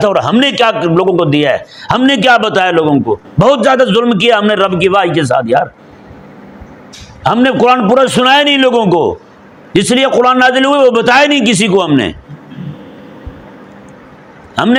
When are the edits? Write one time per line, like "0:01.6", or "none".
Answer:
none